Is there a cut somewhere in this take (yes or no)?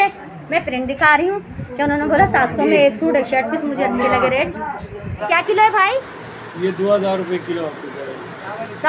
yes